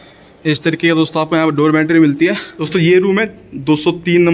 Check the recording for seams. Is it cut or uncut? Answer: cut